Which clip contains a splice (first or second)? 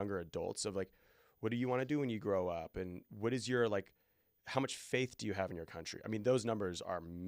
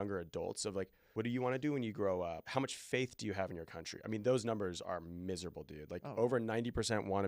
second